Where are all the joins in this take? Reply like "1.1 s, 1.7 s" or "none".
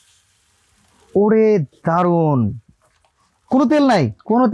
none